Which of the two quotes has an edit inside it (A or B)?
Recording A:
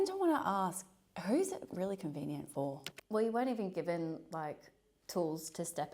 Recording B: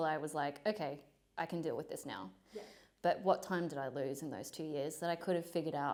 A